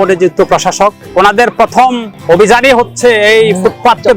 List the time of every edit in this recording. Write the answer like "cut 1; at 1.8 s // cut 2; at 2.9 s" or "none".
cut 1; at 1.0 s // cut 2; at 2.1 s